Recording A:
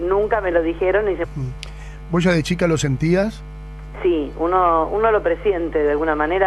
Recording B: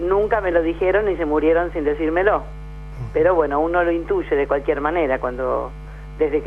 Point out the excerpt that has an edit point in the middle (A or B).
B